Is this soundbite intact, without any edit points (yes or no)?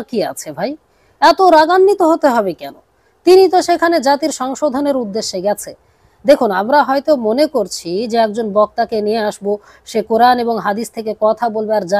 yes